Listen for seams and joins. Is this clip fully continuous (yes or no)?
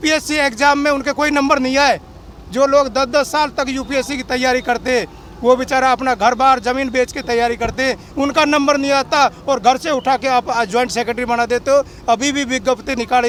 yes